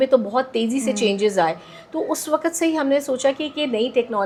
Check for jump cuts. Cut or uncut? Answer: uncut